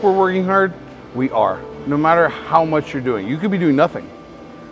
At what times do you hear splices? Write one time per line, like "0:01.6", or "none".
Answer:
0:01.7